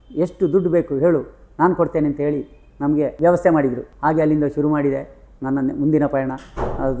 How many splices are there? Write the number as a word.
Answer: two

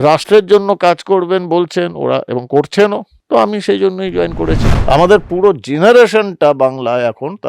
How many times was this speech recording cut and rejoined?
two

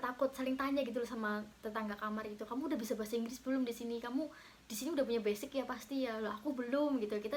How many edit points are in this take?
zero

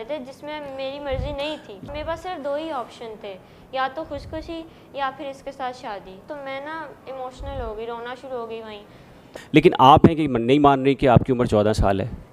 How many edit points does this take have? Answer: three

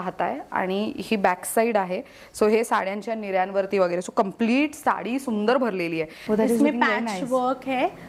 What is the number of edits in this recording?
one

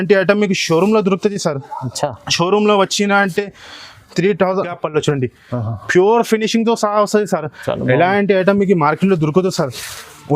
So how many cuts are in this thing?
one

